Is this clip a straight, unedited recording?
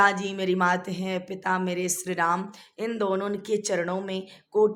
yes; 0 cuts

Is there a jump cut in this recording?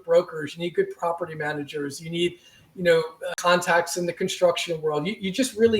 yes; 1 cut; at 3.3 s

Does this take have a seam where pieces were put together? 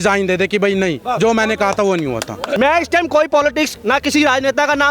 no; 0 cuts

